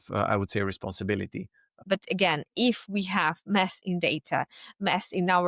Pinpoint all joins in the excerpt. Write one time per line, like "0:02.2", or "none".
0:01.7